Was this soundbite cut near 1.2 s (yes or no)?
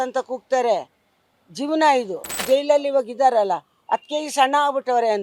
no